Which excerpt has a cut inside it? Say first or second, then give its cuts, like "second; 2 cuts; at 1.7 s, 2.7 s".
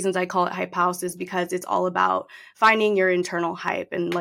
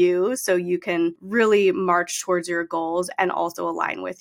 second; 1 cut; at 1.2 s